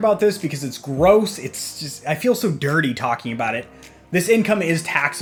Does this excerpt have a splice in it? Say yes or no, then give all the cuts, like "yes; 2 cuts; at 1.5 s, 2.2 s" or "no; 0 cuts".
no; 0 cuts